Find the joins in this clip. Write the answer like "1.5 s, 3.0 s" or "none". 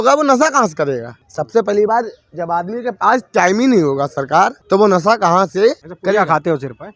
1.2 s, 4.6 s, 5.9 s

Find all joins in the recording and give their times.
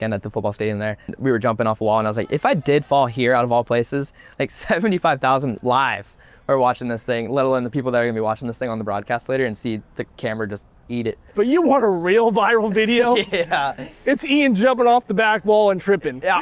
1.1 s, 11.3 s

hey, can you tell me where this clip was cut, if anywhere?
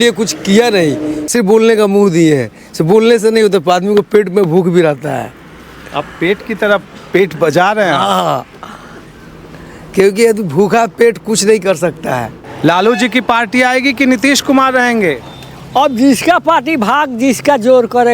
1.2 s, 12.4 s

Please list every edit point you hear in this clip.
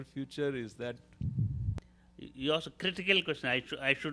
1.8 s

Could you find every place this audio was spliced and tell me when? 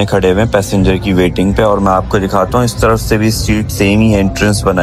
none

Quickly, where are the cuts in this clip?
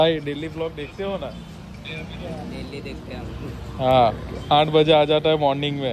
none

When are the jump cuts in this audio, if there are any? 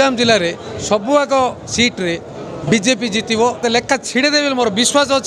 3.6 s

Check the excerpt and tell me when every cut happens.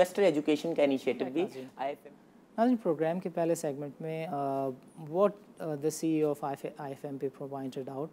none

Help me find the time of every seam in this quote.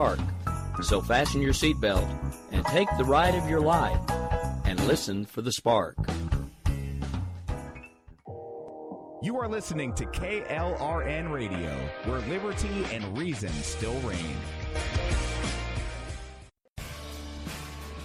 none

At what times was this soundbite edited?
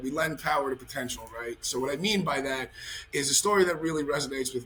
none

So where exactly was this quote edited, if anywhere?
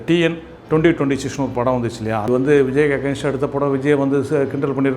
2.2 s

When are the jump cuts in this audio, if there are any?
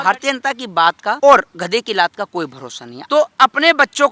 1.2 s, 2.9 s

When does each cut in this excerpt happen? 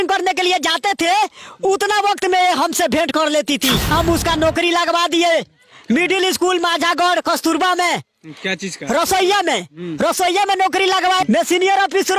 3.9 s, 11.2 s

